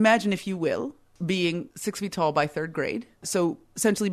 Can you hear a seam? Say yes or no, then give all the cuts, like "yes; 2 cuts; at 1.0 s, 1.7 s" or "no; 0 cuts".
yes; 3 cuts; at 1.1 s, 1.7 s, 3.3 s